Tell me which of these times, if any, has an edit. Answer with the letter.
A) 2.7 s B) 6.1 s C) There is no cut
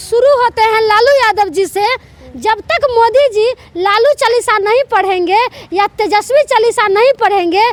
C